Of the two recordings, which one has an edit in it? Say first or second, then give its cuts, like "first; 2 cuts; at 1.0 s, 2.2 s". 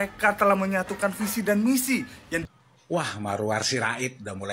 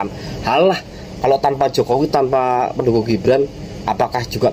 first; 1 cut; at 2.4 s